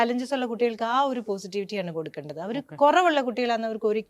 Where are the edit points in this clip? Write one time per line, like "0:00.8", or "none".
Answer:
none